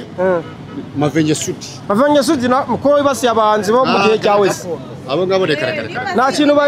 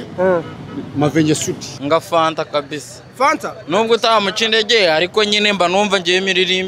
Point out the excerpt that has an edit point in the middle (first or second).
second